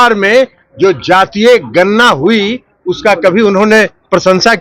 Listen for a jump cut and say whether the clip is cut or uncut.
uncut